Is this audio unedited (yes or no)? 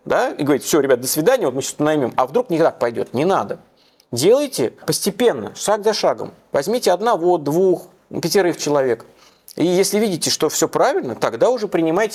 yes